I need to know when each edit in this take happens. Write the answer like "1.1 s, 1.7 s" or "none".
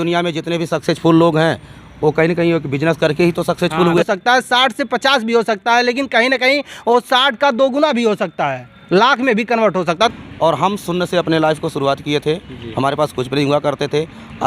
4.0 s, 10.1 s

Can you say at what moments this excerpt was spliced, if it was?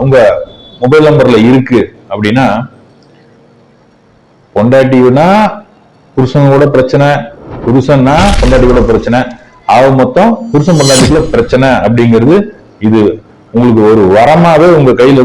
none

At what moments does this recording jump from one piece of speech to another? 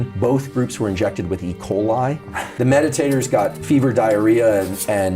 2.5 s

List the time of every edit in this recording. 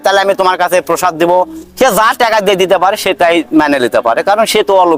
none

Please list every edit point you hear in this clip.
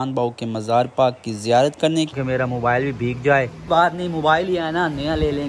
2.1 s

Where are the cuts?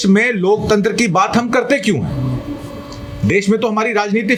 none

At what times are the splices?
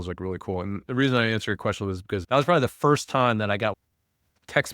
2.2 s, 3.7 s

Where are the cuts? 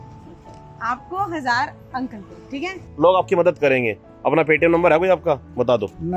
2.9 s

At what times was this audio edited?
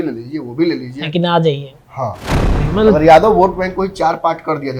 2.6 s

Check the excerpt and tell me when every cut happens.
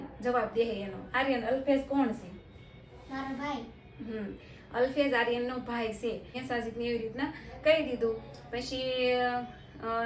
6.3 s

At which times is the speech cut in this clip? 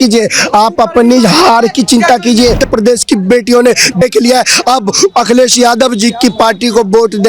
2.6 s

